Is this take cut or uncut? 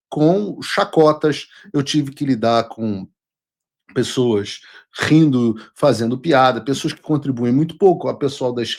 uncut